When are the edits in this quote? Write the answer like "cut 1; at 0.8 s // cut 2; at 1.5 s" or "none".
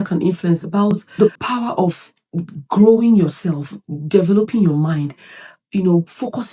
cut 1; at 1.0 s